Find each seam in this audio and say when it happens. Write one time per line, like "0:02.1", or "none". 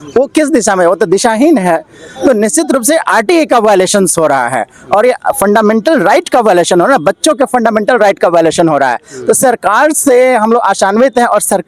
none